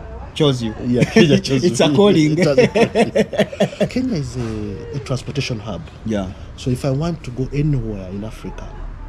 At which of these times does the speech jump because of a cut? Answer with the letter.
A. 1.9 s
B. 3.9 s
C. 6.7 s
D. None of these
B